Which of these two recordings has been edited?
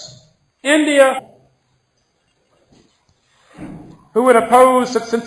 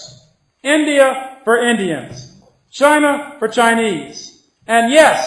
second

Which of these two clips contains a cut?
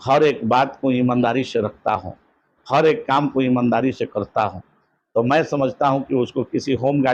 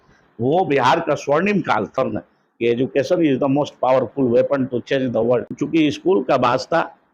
second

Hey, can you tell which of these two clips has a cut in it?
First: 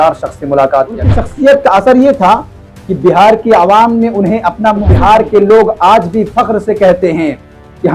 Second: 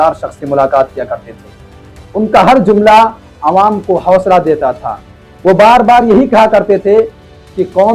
first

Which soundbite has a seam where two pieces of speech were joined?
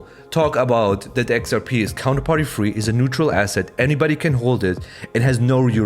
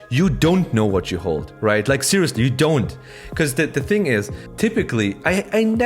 second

